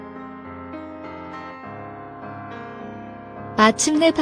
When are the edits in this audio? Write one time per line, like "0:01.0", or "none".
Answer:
0:03.3